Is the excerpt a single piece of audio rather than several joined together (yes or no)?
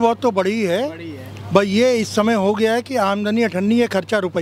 yes